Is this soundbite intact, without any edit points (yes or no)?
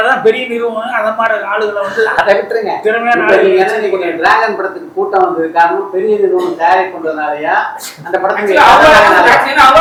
yes